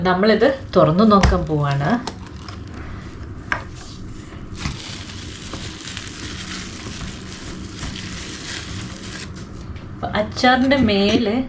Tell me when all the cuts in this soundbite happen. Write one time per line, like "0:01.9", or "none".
0:09.6